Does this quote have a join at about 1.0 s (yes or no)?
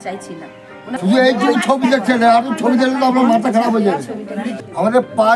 yes